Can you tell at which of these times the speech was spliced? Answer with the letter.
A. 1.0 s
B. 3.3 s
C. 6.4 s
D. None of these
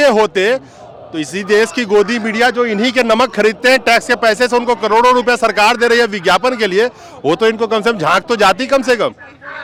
D